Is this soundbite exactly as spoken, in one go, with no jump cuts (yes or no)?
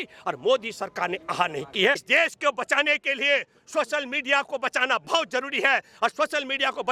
no